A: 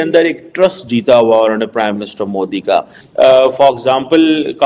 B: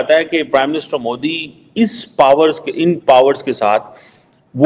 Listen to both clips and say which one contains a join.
A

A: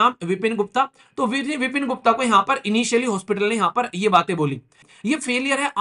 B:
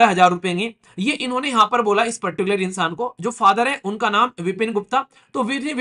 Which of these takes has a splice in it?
A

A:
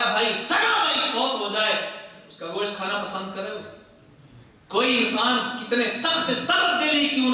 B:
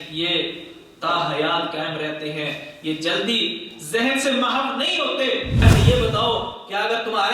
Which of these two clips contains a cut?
B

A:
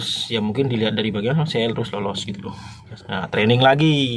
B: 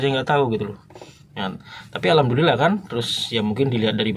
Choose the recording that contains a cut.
A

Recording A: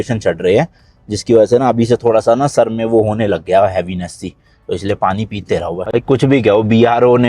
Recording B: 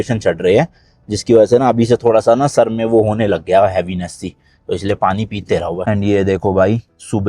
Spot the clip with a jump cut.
B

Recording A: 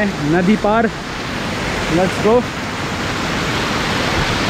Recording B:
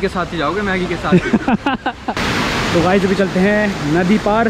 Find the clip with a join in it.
B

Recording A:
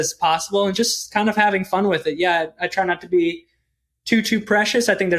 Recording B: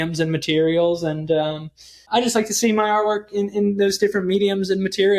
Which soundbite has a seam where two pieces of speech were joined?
B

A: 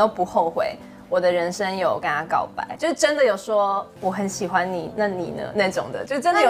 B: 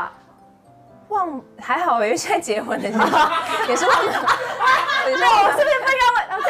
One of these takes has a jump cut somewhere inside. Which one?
A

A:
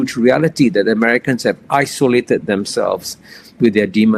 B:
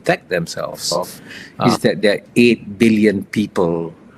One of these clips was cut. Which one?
B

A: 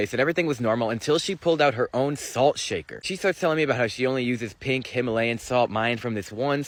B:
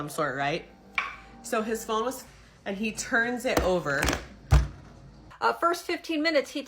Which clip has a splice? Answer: B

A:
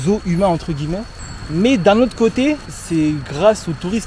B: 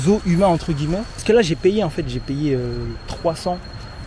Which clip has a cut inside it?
A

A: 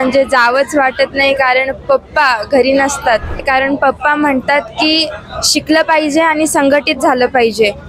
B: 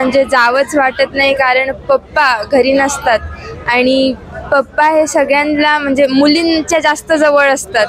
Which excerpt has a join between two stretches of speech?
A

